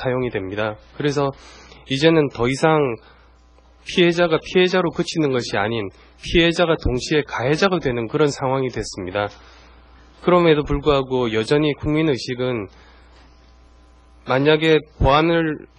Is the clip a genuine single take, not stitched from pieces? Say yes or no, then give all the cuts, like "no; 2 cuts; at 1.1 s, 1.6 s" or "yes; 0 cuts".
no; 1 cut; at 11.2 s